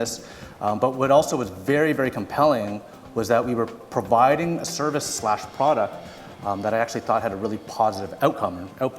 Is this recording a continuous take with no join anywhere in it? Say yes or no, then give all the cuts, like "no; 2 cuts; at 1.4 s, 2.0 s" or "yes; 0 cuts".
no; 1 cut; at 8.1 s